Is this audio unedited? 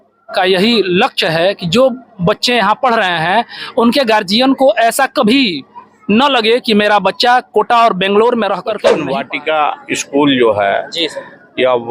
no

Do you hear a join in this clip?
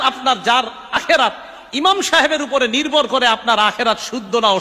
yes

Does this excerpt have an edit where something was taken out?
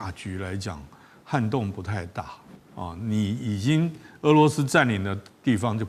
no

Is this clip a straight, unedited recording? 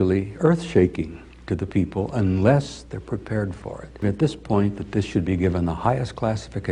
no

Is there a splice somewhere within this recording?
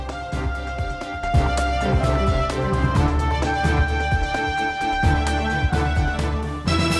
no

